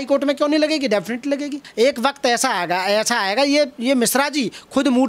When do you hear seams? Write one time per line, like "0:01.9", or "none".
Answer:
0:01.6